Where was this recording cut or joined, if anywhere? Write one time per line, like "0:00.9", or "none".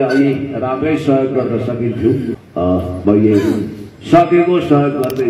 0:02.9